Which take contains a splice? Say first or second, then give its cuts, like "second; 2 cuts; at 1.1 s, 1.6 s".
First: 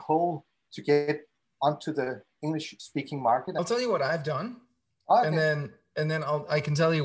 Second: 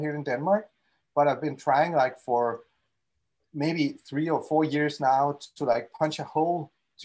first; 1 cut; at 3.6 s